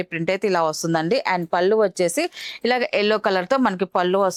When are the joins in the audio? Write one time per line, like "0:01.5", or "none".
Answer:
none